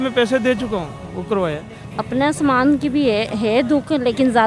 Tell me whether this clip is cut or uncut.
cut